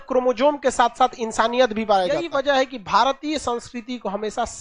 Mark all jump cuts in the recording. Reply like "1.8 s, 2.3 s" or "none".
2.3 s